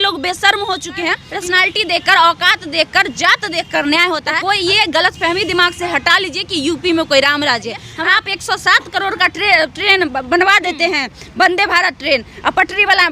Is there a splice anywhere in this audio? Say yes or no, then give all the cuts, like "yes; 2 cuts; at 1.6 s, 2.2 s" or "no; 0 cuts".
yes; 3 cuts; at 1.2 s, 4.4 s, 7.9 s